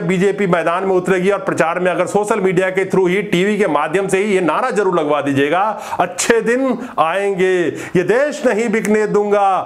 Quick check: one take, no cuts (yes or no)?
yes